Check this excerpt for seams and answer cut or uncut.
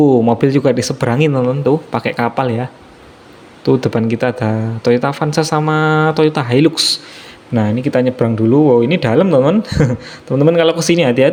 uncut